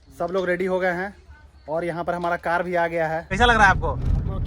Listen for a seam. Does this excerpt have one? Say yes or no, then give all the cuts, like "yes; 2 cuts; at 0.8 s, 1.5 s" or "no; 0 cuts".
yes; 1 cut; at 3.3 s